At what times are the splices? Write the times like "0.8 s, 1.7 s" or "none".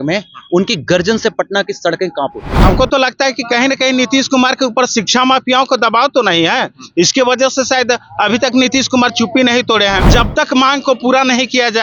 2.5 s, 10.1 s